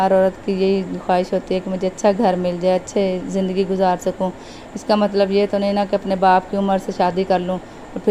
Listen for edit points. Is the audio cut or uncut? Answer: uncut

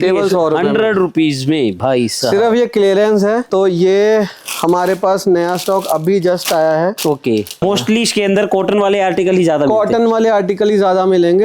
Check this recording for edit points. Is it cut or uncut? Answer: cut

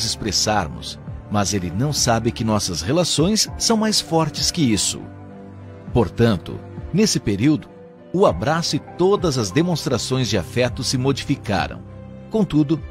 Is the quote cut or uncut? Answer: cut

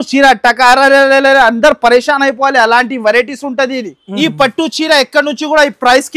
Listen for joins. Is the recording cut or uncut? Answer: cut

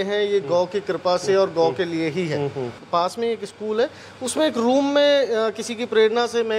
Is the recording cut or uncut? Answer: cut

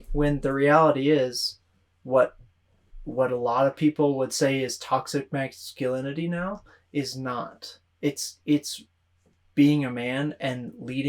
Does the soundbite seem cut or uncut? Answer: uncut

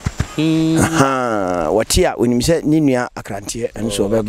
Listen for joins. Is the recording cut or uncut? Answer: uncut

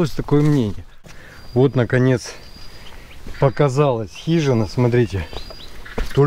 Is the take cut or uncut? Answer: cut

